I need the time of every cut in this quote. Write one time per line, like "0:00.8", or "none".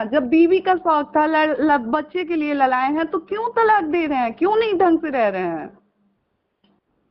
none